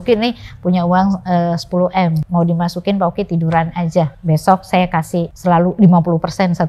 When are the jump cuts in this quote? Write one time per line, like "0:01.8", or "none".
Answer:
0:02.2
0:04.2
0:05.3